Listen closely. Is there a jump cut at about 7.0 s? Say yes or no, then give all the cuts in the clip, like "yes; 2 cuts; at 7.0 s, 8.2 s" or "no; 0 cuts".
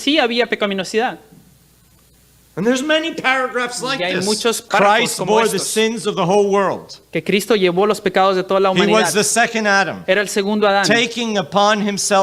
no; 1 cut; at 4.6 s